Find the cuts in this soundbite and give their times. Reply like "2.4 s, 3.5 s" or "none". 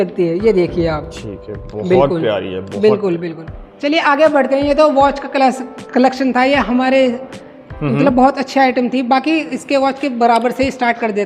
none

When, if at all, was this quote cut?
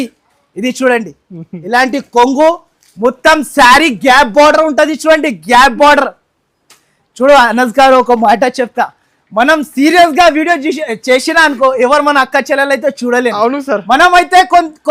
none

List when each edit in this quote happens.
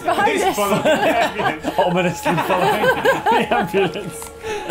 none

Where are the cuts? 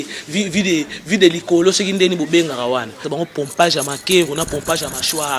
3.0 s

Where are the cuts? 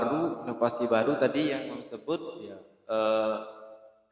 none

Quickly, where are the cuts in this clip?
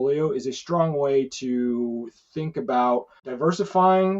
3.2 s

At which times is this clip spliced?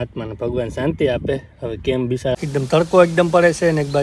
2.3 s

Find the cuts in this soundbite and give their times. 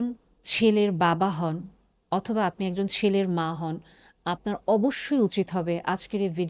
none

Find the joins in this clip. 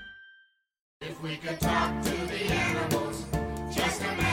0.9 s

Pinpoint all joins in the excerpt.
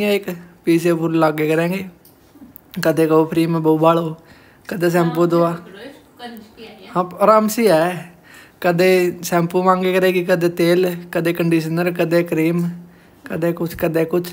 none

